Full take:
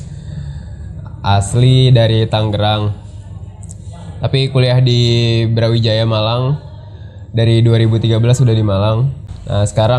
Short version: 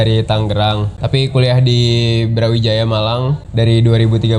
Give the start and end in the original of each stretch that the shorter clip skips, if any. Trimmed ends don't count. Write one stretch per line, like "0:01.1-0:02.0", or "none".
0:03.0-0:04.1
0:06.6-0:07.2